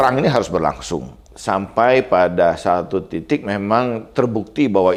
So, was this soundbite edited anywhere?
no; 0 cuts

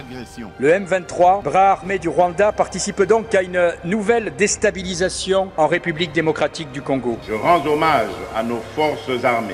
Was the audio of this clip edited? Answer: no; 0 cuts

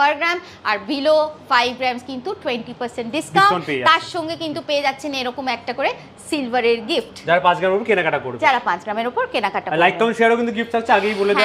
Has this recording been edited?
no; 0 cuts

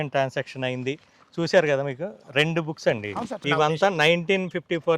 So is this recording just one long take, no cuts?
no; 1 cut; at 3.5 s

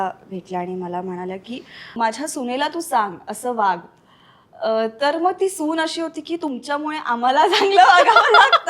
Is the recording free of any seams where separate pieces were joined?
no; 1 cut; at 1.9 s

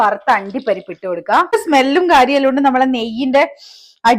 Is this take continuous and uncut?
no; 1 cut; at 1.5 s

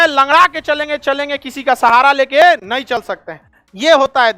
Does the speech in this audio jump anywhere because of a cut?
no; 0 cuts

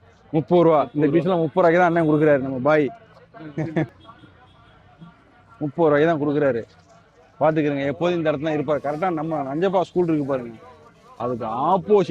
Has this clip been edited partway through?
yes; 1 cut; at 3.9 s

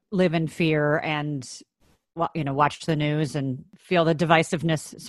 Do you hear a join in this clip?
yes; 1 cut; at 3.7 s

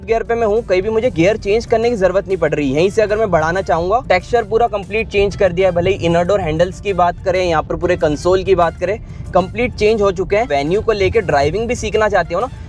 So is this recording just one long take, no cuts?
no; 2 cuts; at 4.0 s, 10.5 s

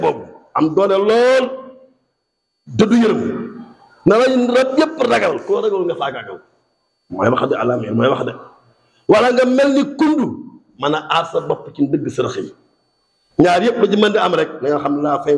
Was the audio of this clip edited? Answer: no; 0 cuts

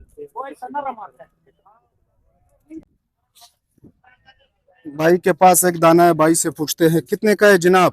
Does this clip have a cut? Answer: yes; 1 cut; at 2.8 s

